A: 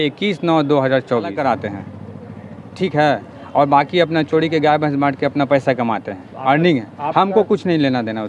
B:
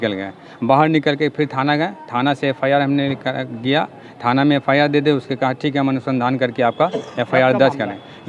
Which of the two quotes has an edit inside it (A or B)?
A